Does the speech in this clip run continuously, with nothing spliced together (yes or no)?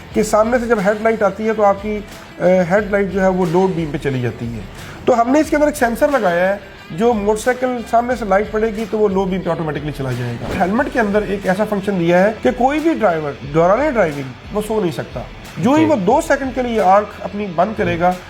no